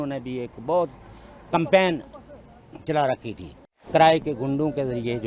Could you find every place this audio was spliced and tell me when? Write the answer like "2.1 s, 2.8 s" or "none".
3.8 s